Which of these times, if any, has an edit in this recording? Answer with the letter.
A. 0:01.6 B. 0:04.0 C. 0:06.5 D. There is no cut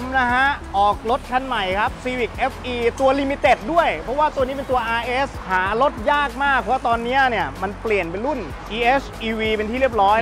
D